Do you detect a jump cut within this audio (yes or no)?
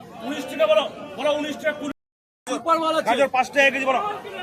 yes